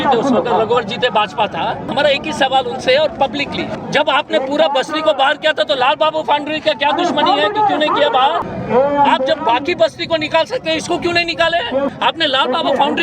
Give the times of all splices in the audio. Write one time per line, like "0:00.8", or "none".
0:01.9
0:03.7
0:08.5
0:11.9